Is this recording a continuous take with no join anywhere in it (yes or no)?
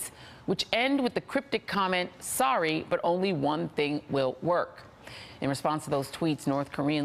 no